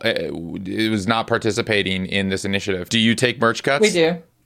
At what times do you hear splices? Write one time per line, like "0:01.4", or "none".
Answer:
0:02.8